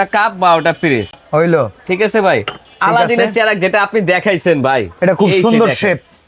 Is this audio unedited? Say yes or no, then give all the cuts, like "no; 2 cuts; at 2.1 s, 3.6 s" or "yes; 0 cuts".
yes; 0 cuts